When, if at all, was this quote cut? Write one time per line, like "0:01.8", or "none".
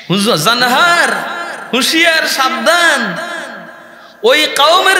none